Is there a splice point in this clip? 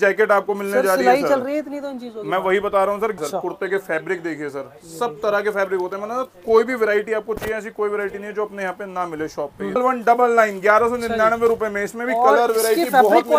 yes; 2 cuts; at 3.2 s, 9.8 s

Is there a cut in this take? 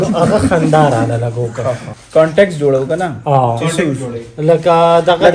no; 0 cuts

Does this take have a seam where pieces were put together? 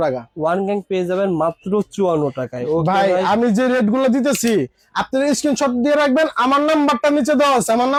no; 0 cuts

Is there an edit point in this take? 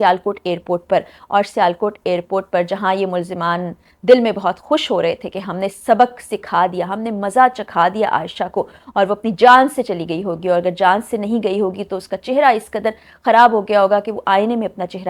no; 0 cuts

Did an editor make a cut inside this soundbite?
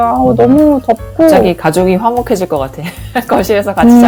no; 0 cuts

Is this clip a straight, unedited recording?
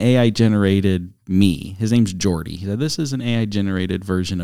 yes; 0 cuts

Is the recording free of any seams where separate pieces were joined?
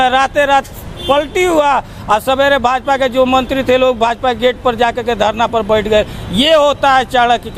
yes; 0 cuts

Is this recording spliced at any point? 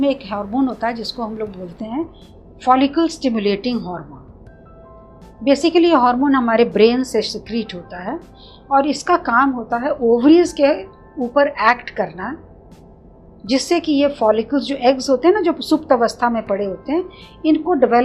no; 0 cuts

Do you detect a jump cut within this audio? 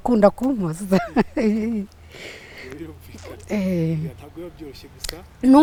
no; 0 cuts

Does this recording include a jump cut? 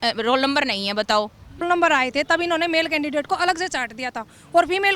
yes; 1 cut; at 1.6 s

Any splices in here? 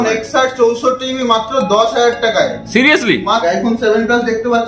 yes; 1 cut; at 3.4 s

